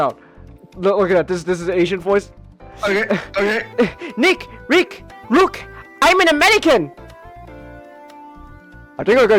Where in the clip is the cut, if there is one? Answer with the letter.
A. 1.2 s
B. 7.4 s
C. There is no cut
C